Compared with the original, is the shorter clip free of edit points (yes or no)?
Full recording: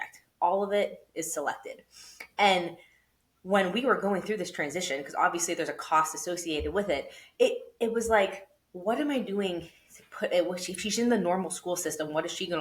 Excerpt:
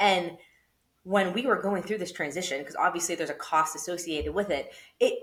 yes